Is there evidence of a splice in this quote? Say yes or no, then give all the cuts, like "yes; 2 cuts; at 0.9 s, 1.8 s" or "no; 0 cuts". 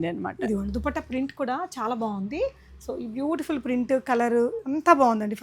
no; 0 cuts